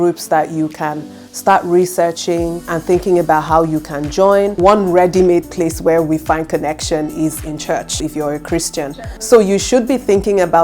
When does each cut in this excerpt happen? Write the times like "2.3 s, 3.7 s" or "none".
4.5 s, 8.0 s